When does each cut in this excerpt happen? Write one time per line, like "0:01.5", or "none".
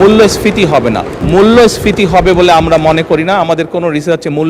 0:01.1